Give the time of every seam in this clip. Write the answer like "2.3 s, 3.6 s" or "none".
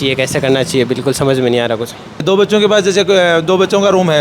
2.2 s